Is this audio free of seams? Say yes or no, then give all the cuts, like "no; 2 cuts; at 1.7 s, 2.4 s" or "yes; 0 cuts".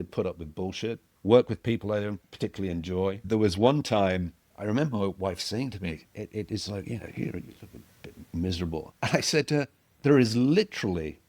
no; 6 cuts; at 1.1 s, 2.3 s, 3.2 s, 4.4 s, 8.9 s, 9.8 s